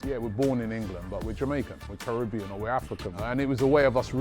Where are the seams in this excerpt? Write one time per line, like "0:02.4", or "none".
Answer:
0:01.9
0:03.2

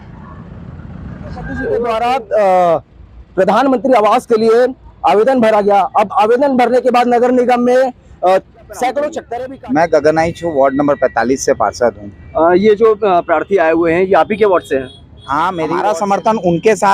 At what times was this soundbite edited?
0:01.8
0:09.2
0:15.7

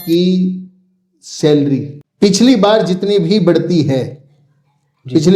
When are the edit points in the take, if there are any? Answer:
0:02.0

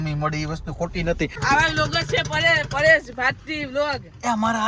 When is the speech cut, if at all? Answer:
0:01.4

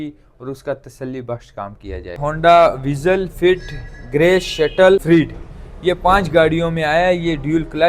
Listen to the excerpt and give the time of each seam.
0:02.2
0:05.0

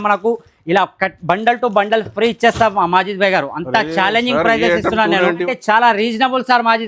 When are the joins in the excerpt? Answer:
0:05.4

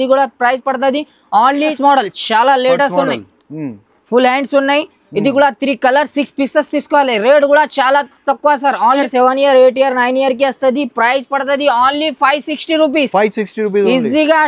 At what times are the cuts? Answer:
0:01.8
0:09.0

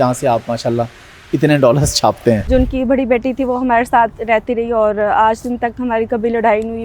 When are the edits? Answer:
0:02.4

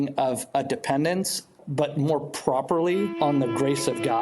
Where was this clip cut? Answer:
0:01.6
0:03.1

